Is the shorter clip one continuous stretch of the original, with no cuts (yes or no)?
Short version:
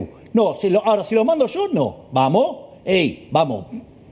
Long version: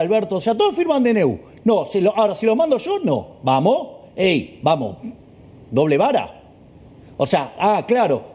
yes